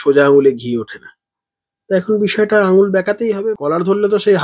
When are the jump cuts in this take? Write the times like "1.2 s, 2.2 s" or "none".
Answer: 3.5 s